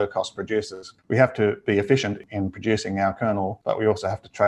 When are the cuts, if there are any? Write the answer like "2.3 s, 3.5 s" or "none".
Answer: 0.9 s, 2.2 s, 3.6 s